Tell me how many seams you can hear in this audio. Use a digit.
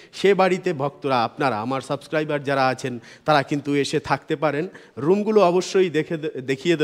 0